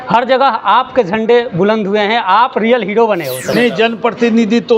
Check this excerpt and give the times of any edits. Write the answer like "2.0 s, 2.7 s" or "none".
3.4 s